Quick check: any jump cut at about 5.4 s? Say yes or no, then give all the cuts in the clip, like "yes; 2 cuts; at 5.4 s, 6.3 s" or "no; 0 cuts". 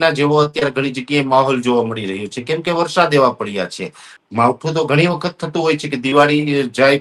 no; 1 cut; at 4.1 s